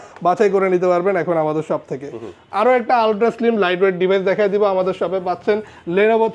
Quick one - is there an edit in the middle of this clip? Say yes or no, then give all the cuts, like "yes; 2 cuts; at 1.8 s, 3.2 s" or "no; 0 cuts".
no; 0 cuts